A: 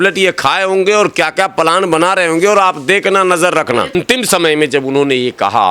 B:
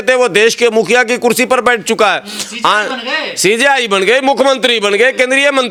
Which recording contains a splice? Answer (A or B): A